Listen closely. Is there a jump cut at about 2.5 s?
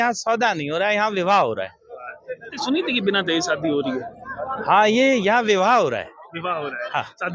yes; 1 cut; at 2.5 s

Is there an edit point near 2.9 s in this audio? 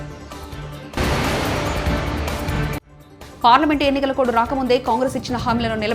yes; 2 cuts; at 0.7 s, 2.9 s

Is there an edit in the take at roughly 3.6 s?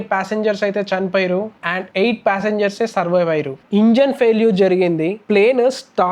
yes; 1 cut; at 3.6 s

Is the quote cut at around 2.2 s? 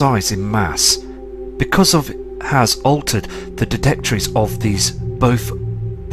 no; 1 cut; at 3.6 s

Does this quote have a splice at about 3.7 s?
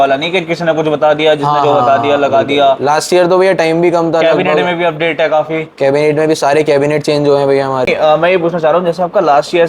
no; 1 cut; at 7.9 s

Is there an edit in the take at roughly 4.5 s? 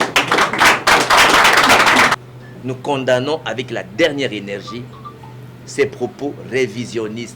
no; 1 cut; at 2.1 s

